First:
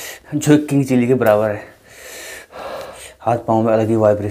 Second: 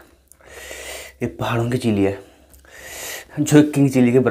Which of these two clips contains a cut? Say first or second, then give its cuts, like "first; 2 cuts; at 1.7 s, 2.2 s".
first; 1 cut; at 2.9 s